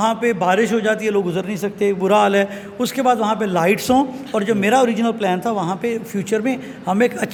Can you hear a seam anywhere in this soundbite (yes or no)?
no